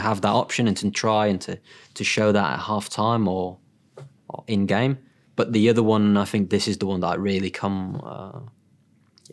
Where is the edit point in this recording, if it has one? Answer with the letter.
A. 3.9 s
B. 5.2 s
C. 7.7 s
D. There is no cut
B